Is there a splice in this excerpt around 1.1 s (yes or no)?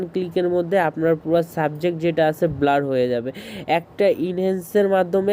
no